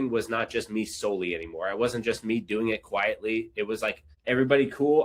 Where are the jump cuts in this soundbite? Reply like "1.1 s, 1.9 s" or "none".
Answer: 4.1 s